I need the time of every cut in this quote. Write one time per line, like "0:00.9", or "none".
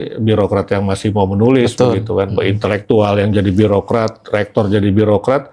none